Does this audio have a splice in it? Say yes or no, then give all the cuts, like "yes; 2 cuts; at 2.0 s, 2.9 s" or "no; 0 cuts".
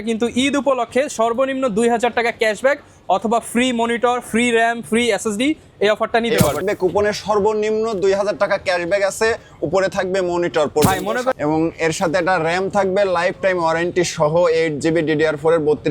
yes; 2 cuts; at 6.6 s, 11.4 s